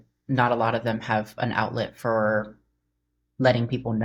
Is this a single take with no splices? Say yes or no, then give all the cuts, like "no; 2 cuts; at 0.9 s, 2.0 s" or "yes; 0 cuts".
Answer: yes; 0 cuts